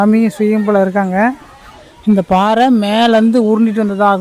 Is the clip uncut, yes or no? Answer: yes